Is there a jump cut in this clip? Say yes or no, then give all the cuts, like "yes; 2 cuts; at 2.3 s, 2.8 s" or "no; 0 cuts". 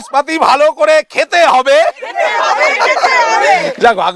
no; 0 cuts